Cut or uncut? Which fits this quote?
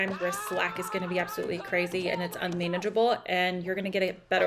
uncut